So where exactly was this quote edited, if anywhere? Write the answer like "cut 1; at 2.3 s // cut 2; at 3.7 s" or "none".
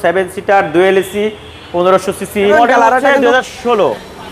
cut 1; at 1.6 s // cut 2; at 2.5 s